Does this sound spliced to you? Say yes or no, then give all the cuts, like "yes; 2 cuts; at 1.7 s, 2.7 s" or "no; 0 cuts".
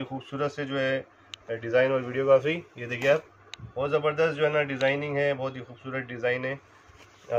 no; 0 cuts